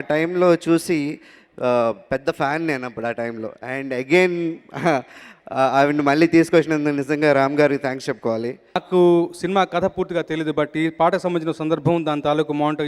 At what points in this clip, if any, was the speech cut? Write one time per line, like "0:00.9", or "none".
0:08.8